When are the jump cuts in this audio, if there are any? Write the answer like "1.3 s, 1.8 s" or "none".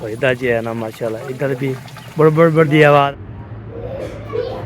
3.1 s